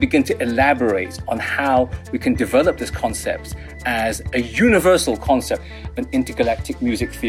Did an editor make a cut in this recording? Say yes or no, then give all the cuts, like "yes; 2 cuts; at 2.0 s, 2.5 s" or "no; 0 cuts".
yes; 1 cut; at 5.8 s